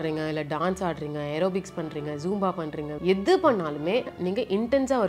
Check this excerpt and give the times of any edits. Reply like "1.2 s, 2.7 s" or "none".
3.0 s, 4.1 s